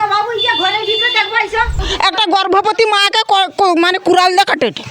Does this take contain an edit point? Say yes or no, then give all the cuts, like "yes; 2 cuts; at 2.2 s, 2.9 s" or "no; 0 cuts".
yes; 1 cut; at 1.8 s